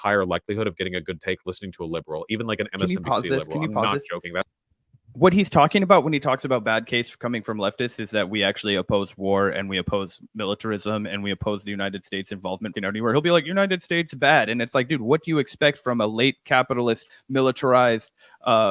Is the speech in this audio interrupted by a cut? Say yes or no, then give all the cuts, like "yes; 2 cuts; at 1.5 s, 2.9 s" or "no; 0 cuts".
yes; 2 cuts; at 12.7 s, 17.1 s